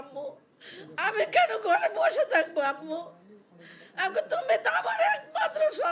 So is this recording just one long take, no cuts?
yes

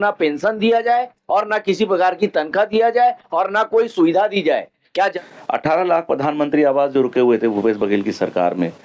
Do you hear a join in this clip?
yes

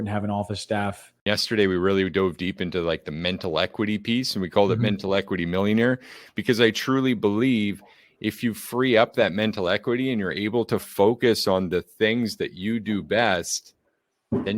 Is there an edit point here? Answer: yes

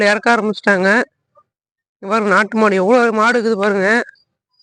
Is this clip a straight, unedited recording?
yes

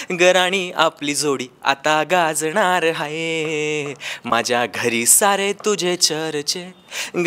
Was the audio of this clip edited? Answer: no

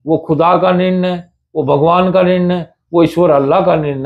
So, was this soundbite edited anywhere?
no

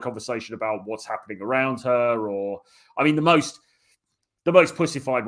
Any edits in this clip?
no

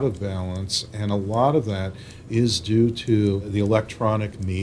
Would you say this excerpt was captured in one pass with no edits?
no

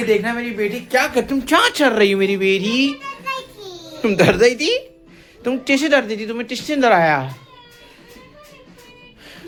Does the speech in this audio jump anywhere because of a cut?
no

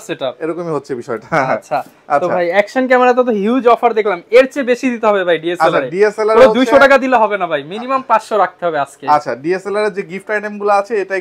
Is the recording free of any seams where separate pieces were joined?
yes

